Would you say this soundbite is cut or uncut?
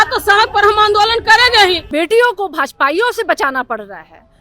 cut